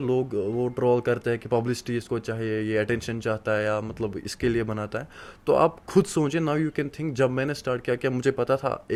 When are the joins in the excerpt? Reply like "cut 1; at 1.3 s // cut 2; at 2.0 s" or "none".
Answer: none